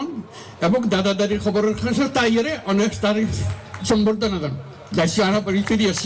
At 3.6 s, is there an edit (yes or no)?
no